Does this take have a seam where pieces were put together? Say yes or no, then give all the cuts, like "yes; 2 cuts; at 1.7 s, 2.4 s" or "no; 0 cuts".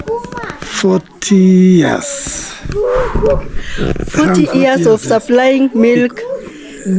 no; 0 cuts